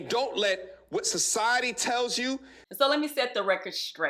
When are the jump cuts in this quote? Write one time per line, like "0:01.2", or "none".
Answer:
0:02.6